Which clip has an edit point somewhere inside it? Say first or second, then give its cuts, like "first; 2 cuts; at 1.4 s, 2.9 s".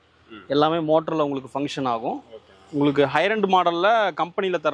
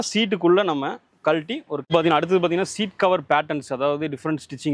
second; 1 cut; at 1.8 s